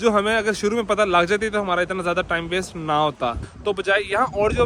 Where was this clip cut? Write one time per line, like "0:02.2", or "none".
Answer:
0:03.5